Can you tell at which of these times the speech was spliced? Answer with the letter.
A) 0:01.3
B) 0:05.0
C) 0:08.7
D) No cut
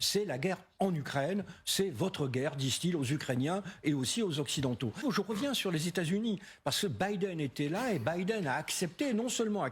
B